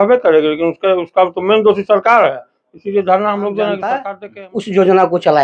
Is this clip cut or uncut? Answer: cut